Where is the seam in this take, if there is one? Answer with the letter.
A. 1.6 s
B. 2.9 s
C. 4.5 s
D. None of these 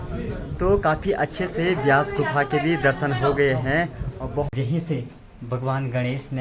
C